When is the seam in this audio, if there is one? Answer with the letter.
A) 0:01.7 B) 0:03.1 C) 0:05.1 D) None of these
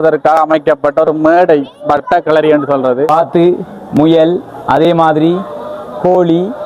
B